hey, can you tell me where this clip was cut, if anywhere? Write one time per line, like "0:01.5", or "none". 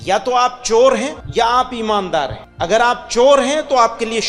0:01.2
0:02.4